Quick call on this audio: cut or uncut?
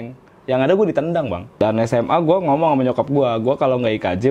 cut